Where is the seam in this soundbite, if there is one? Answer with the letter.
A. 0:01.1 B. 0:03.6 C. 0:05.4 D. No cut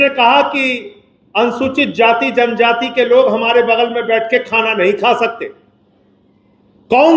D